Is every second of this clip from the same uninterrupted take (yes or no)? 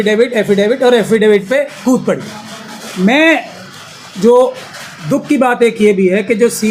yes